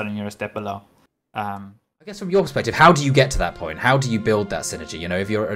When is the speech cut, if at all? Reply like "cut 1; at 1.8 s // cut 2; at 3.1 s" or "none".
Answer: cut 1; at 2.2 s